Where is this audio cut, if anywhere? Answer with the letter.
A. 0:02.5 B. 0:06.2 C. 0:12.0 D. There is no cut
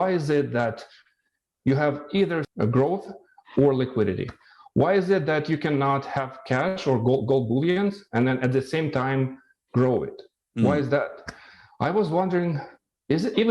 A